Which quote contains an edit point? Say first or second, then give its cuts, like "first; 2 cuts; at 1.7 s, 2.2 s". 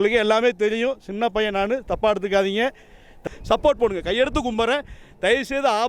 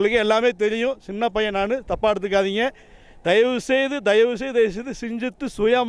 first; 1 cut; at 3.2 s